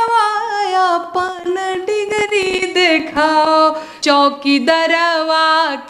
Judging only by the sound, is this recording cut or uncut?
cut